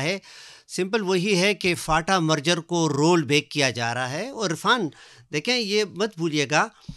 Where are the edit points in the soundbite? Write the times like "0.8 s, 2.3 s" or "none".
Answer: none

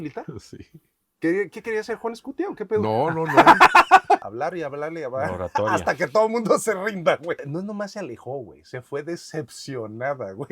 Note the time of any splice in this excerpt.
4.2 s, 7.4 s

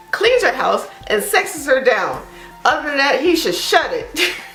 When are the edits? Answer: none

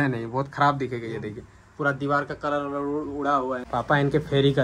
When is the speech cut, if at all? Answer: 3.6 s

